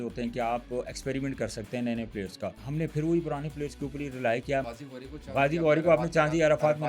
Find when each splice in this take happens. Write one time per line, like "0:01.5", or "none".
0:02.6
0:04.8